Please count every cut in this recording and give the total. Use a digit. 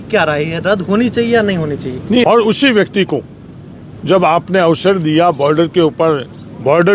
1